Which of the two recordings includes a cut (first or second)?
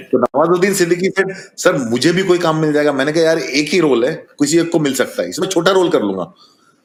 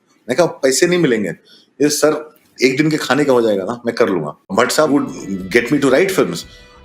second